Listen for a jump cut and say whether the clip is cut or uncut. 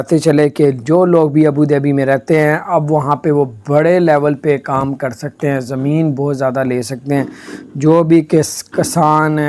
uncut